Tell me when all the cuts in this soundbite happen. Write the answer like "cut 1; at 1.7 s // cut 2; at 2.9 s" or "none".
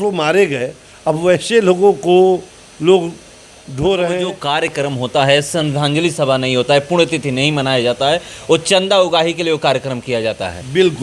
cut 1; at 4.4 s